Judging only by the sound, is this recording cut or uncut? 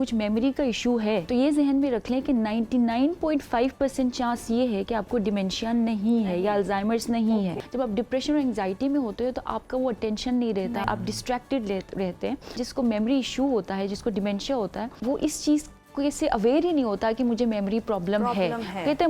cut